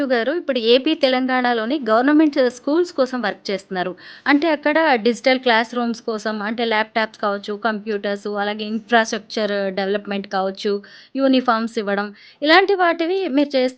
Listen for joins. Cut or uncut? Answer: uncut